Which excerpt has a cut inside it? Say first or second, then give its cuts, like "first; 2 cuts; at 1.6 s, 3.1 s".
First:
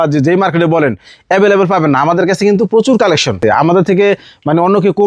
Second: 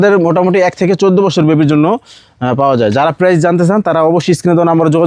first; 1 cut; at 3.4 s